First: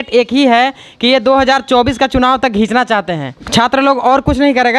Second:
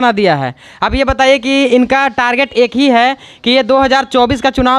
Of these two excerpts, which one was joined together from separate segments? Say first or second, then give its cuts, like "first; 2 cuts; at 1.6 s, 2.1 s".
first; 1 cut; at 3.4 s